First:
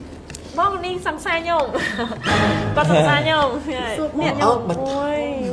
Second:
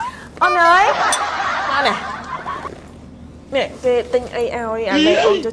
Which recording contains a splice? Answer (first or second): first